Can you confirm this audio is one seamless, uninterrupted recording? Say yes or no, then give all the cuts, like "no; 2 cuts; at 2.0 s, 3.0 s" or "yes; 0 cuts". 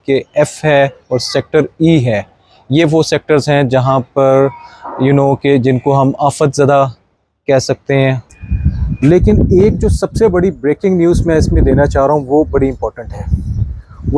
no; 1 cut; at 8.2 s